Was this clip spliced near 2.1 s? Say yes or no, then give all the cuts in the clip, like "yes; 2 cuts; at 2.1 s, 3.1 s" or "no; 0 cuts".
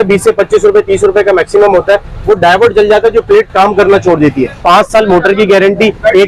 no; 1 cut; at 4.6 s